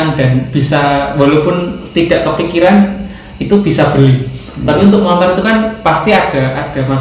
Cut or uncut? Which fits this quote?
uncut